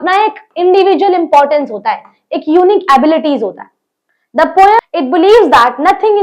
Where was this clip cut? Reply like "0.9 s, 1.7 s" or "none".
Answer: 4.8 s

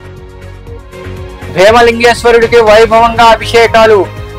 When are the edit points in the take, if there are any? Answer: 1.5 s

